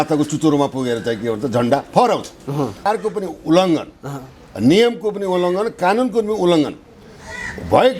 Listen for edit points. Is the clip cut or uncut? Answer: cut